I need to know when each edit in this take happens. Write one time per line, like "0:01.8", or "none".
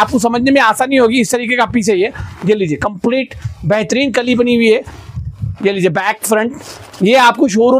none